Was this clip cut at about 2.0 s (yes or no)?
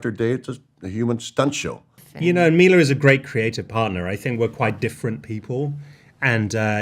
yes